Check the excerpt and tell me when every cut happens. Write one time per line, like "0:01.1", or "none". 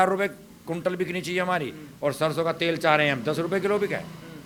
none